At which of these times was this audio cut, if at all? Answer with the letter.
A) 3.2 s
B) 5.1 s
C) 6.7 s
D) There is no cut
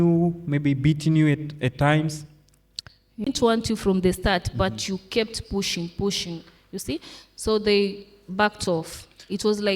A